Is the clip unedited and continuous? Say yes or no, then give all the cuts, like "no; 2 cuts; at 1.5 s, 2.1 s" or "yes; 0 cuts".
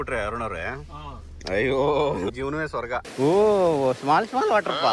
no; 1 cut; at 3.0 s